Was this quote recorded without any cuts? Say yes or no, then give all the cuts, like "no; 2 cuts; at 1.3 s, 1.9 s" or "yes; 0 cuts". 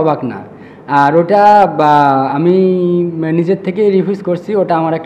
yes; 0 cuts